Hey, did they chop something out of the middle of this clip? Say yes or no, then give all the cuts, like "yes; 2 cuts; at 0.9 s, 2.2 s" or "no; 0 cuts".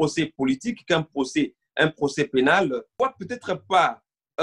yes; 1 cut; at 2.9 s